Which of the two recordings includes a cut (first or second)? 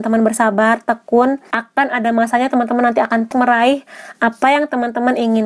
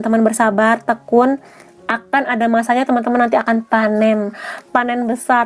first